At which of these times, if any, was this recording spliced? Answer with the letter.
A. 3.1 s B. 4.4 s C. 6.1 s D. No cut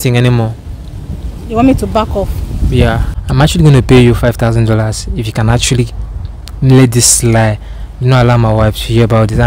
A